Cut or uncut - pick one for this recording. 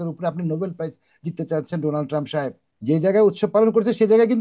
cut